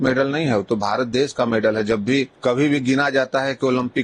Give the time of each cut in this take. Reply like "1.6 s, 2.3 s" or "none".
2.3 s